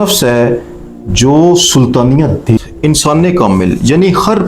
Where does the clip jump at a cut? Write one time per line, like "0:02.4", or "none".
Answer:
0:02.6